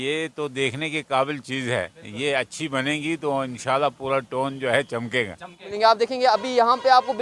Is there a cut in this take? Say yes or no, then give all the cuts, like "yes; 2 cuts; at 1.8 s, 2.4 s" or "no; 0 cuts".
yes; 1 cut; at 5.7 s